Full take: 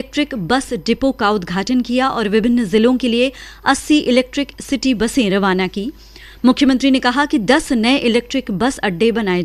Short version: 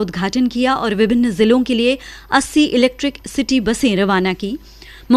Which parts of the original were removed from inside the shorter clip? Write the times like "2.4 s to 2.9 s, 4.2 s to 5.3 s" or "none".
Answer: none